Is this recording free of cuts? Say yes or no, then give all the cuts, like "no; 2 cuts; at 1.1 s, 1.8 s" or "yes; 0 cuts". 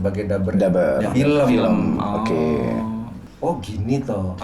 no; 1 cut; at 3.2 s